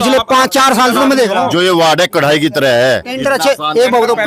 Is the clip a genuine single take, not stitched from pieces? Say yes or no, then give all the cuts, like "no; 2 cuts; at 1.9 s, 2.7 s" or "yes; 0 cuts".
yes; 0 cuts